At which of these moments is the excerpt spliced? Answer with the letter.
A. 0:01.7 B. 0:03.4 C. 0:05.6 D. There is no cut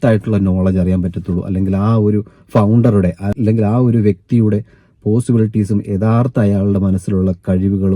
B